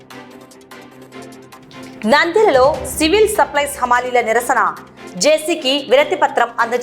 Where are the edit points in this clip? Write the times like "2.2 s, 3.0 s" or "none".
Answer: 1.6 s